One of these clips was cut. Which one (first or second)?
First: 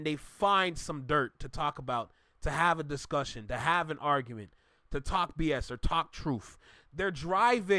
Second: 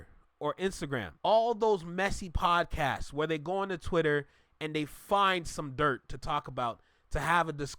second